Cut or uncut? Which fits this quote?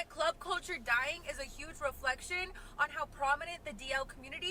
uncut